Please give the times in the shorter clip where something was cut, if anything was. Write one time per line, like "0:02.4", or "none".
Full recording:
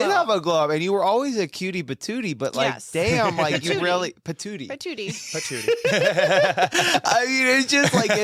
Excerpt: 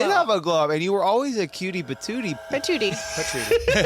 0:02.4